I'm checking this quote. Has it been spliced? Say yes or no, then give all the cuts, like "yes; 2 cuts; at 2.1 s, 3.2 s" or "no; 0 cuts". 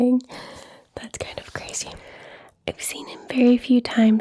yes; 1 cut; at 2.1 s